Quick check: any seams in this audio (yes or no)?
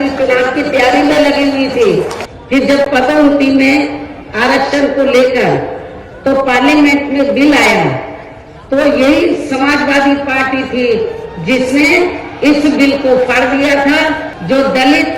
yes